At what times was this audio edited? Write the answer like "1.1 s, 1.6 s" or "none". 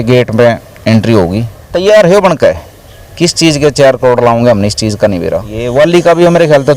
1.6 s, 5.6 s